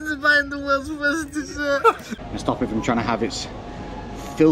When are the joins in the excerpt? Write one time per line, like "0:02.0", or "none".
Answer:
0:02.1